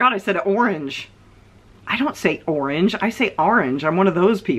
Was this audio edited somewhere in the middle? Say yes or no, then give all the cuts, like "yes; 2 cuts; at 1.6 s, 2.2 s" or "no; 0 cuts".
no; 0 cuts